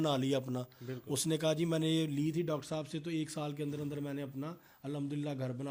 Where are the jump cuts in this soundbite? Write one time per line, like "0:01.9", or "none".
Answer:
none